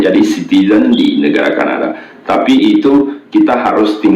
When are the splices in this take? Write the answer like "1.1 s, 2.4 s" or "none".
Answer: none